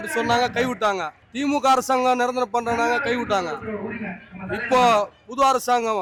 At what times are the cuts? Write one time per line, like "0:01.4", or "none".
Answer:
none